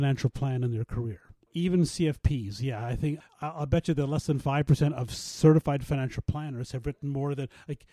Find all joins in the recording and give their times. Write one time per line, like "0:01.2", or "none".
0:01.5
0:03.2